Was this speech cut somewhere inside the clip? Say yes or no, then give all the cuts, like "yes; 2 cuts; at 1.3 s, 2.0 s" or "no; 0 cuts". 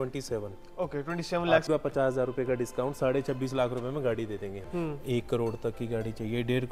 yes; 2 cuts; at 1.7 s, 4.6 s